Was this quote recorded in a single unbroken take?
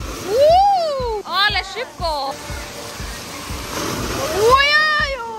yes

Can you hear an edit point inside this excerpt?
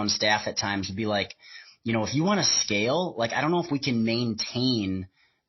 no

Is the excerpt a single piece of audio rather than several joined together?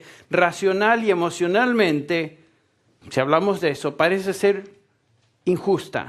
no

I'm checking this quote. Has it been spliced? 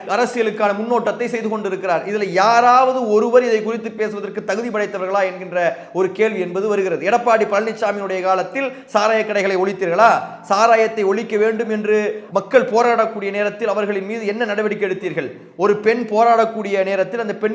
no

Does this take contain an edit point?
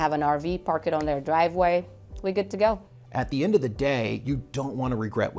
yes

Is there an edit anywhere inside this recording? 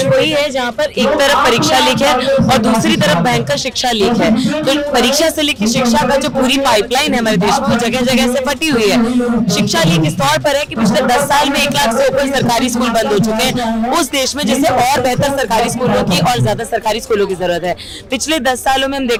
no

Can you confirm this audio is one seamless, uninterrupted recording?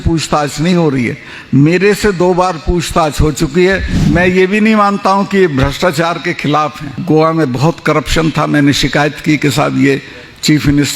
no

